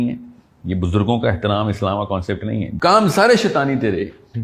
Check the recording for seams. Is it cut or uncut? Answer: cut